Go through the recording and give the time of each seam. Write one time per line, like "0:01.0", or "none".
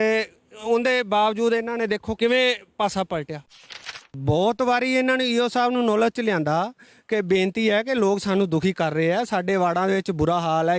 0:02.2
0:03.9